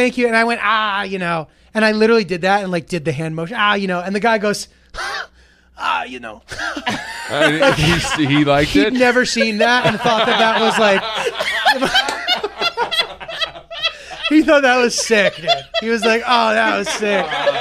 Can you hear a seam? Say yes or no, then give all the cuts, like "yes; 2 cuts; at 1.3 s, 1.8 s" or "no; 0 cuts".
no; 0 cuts